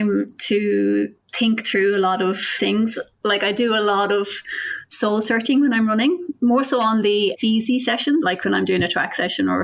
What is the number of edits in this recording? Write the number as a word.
zero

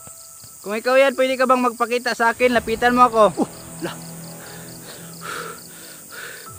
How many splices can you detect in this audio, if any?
one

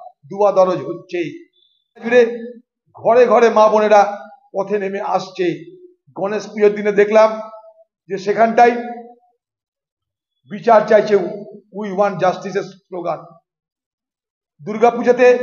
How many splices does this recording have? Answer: one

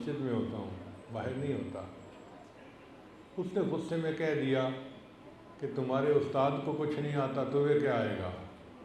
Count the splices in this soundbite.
zero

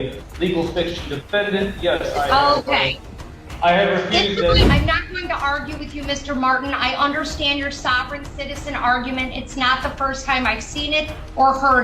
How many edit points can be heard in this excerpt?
one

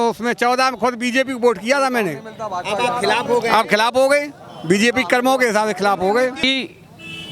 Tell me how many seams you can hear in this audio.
one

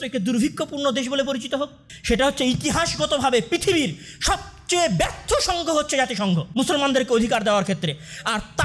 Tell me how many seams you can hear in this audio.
two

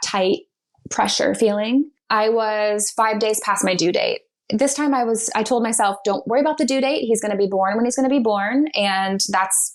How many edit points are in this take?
one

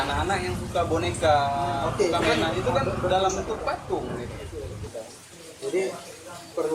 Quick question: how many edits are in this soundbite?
one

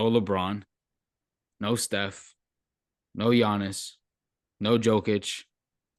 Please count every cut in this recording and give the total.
zero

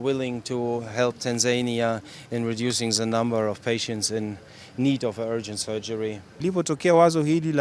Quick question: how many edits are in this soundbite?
one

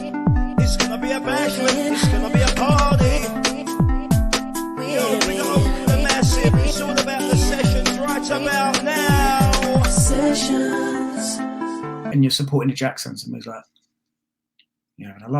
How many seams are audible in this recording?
one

